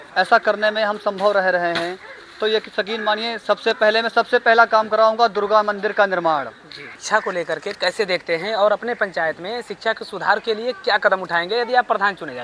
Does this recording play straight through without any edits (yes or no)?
no